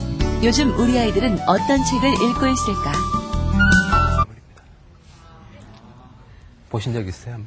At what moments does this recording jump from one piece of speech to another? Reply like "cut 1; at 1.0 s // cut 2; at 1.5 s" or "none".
none